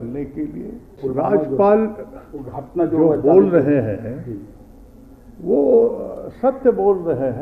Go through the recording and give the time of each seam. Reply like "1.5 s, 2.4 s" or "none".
1.0 s

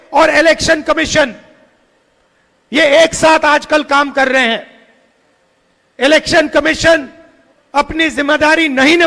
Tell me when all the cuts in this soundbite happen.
none

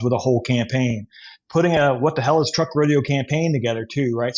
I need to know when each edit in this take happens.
none

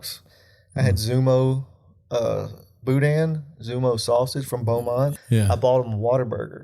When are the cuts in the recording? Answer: 5.1 s

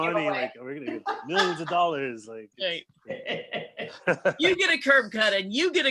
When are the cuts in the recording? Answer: none

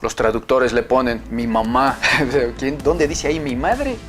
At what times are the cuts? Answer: 1.3 s

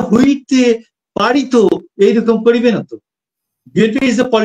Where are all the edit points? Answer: none

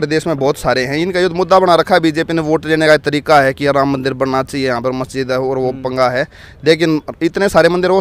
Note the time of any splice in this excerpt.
none

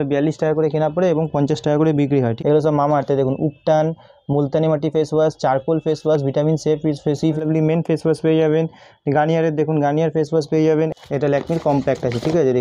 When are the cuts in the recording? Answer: 2.3 s, 7.4 s, 10.9 s

